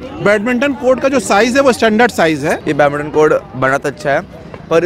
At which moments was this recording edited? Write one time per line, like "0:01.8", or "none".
0:02.6